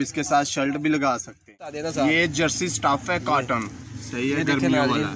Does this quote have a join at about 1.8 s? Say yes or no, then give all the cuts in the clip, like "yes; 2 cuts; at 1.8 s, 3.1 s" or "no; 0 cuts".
yes; 1 cut; at 1.8 s